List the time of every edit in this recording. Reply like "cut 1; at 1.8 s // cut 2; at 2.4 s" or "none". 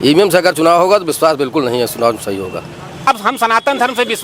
cut 1; at 3.1 s